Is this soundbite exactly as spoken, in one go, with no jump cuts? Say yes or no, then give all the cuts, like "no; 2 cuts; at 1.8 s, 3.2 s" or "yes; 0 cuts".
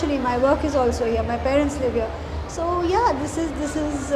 yes; 0 cuts